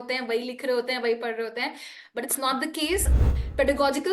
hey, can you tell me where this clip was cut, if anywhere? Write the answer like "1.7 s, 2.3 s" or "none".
3.1 s